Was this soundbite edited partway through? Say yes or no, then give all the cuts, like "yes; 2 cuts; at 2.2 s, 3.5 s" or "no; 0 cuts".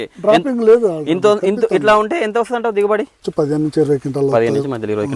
yes; 1 cut; at 3.3 s